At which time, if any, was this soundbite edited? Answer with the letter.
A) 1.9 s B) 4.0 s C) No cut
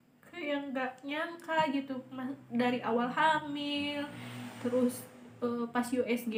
C